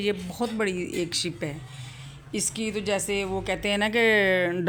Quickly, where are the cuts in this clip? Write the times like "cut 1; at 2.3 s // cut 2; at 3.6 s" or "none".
none